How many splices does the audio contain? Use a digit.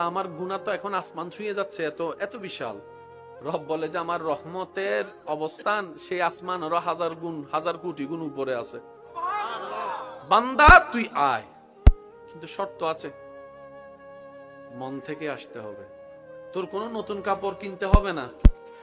2